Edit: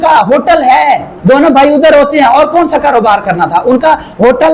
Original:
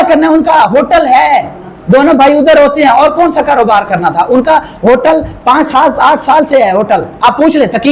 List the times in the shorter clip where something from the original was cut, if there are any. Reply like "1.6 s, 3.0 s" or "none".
1.1 s